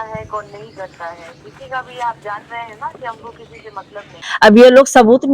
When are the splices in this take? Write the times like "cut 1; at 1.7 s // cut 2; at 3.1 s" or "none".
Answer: cut 1; at 4.2 s